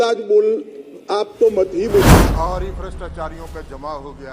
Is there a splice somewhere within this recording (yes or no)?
yes